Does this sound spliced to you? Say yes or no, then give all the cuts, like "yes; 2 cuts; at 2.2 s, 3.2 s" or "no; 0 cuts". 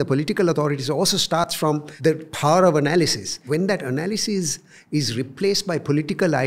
yes; 2 cuts; at 1.6 s, 3.3 s